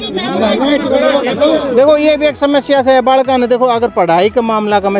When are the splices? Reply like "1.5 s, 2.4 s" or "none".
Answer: none